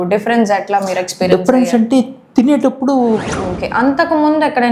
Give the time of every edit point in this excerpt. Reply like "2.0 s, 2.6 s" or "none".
3.3 s